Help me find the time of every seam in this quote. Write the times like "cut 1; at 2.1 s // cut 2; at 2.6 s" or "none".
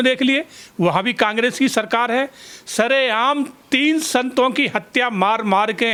none